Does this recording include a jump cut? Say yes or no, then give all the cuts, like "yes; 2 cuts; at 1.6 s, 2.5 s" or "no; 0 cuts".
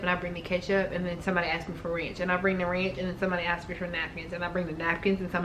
no; 0 cuts